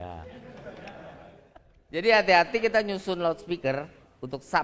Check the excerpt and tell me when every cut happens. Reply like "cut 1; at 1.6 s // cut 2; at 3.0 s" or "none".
cut 1; at 1.8 s